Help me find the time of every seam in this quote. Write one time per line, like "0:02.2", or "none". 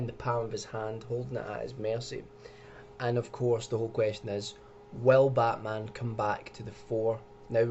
0:05.5